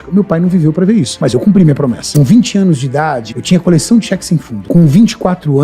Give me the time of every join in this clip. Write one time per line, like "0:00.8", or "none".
0:01.2
0:02.0
0:03.3
0:04.5

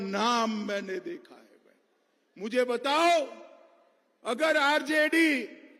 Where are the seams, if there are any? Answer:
none

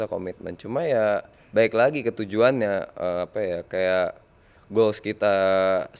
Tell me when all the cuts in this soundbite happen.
none

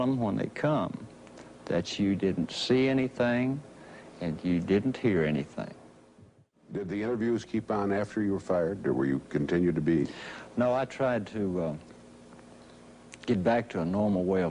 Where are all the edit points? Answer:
none

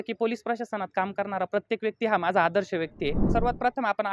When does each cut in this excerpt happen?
0:03.2

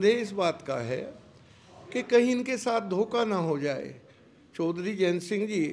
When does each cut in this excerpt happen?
none

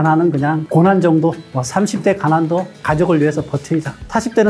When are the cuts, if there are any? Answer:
0:01.4
0:02.7

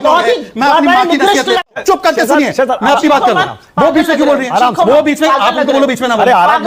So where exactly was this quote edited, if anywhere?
0:01.7

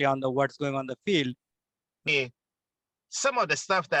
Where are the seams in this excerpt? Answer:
0:02.1

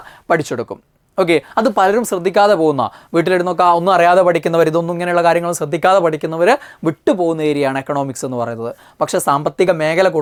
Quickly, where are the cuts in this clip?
none

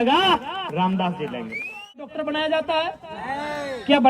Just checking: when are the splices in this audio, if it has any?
0:02.0

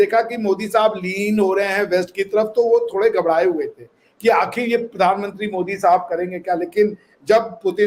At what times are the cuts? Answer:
none

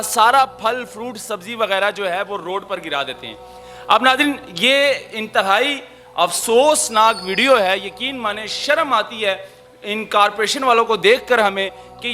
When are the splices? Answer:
none

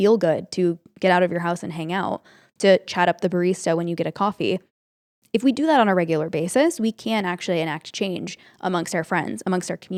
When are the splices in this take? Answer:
none

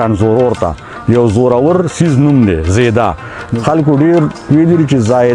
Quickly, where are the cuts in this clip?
0:03.4

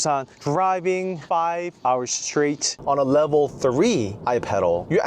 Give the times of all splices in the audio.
0:01.4
0:02.8

